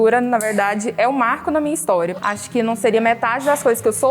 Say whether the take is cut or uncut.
cut